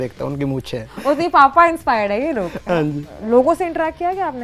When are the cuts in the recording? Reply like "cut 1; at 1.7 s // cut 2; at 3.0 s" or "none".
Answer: cut 1; at 0.9 s // cut 2; at 3.1 s